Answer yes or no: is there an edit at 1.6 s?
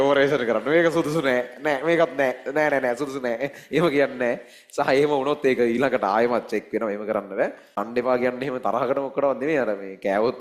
no